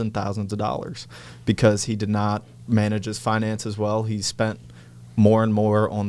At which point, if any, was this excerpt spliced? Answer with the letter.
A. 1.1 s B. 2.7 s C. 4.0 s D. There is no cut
D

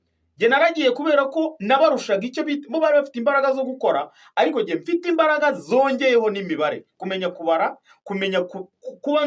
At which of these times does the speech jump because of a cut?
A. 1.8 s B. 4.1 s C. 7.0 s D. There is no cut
D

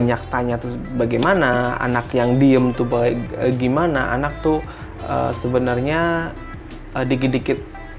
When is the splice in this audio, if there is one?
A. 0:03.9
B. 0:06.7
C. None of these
C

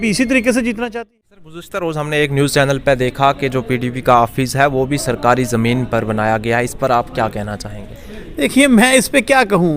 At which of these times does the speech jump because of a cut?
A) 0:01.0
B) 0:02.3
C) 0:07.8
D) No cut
A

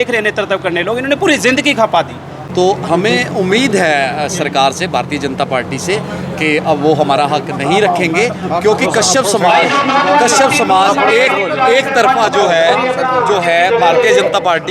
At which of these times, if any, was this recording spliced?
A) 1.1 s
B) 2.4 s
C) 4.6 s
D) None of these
B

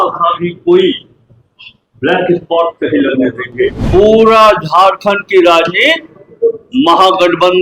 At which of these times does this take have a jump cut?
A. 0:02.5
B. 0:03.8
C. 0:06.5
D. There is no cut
B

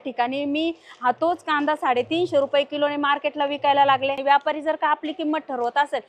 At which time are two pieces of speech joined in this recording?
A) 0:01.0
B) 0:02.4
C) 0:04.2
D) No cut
C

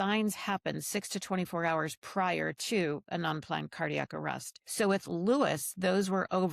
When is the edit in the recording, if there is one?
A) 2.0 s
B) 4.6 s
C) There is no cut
B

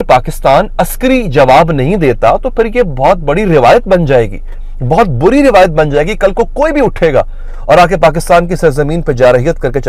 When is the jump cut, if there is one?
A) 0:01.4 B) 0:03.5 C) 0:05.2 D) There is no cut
D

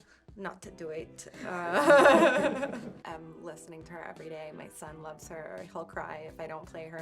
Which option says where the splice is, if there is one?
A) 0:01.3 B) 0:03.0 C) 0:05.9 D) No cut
B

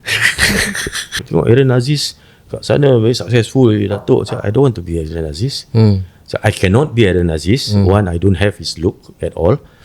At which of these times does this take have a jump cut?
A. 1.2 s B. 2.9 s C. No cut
A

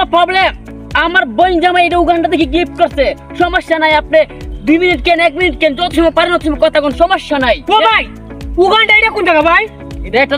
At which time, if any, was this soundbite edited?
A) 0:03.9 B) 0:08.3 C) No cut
C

